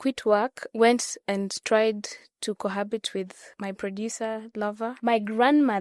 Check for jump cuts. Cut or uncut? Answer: cut